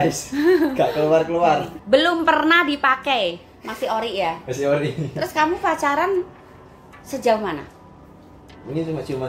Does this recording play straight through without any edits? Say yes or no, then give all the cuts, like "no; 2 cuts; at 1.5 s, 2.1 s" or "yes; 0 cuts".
no; 1 cut; at 1.7 s